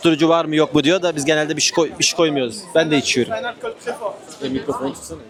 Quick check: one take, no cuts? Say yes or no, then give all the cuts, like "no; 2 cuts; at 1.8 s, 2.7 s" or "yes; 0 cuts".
yes; 0 cuts